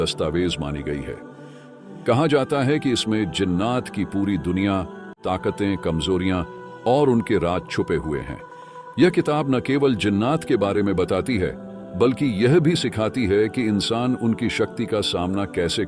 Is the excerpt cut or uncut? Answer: cut